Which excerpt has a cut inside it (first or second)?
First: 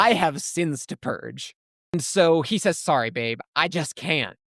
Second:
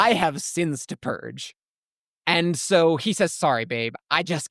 first